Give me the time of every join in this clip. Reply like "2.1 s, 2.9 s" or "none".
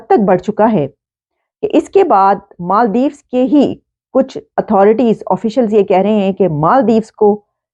none